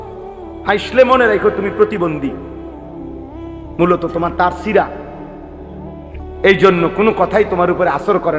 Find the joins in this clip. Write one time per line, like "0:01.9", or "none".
none

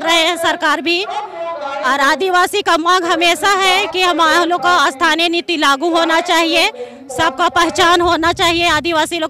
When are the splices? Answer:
none

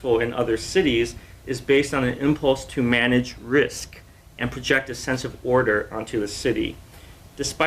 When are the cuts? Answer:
0:01.1

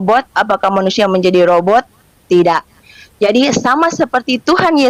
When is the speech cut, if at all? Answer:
none

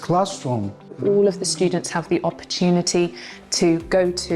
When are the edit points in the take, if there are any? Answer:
0:01.0

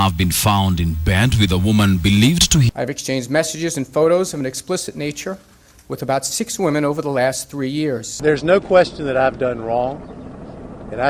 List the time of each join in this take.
0:02.7

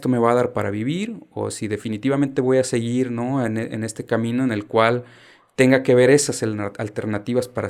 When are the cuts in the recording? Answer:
none

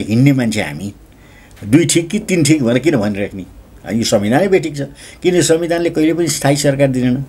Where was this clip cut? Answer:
none

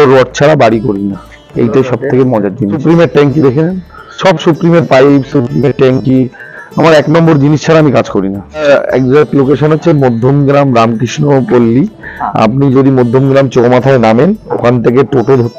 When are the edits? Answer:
0:02.8
0:08.6

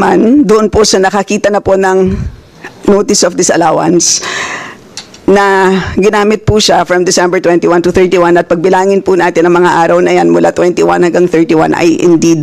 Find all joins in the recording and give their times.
none

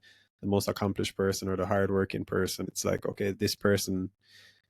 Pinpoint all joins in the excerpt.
0:02.6

